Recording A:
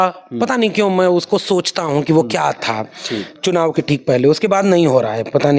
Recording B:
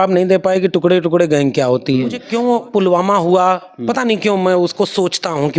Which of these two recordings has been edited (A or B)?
B